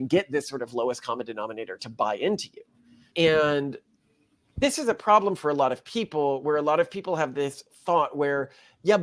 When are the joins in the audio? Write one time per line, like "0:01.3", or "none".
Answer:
0:04.6